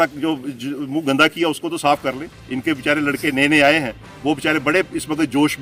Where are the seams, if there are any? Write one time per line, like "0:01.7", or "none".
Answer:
none